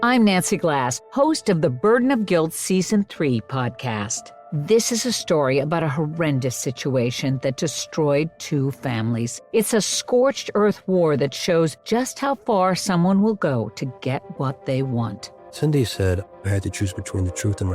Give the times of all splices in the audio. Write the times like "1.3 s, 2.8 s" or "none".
4.1 s